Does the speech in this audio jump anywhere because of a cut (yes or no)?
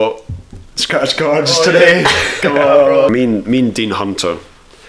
yes